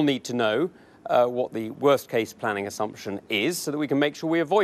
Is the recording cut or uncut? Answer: uncut